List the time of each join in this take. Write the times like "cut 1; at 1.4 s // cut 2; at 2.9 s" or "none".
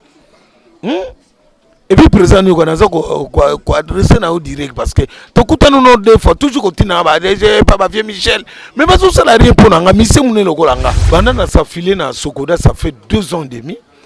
cut 1; at 11.0 s